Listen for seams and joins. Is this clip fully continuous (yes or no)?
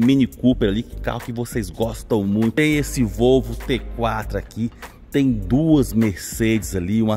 no